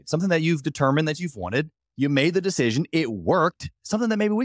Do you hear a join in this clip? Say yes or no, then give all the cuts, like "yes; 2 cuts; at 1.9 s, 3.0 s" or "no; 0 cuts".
no; 0 cuts